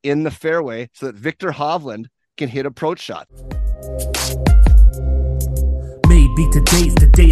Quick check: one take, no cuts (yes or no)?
no